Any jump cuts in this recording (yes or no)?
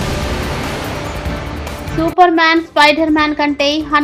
no